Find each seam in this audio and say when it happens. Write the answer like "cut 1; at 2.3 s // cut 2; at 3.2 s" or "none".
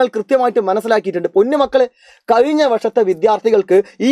none